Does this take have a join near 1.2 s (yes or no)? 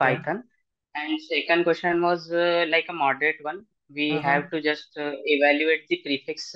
no